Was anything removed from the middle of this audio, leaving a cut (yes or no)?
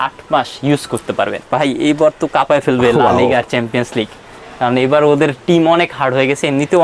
yes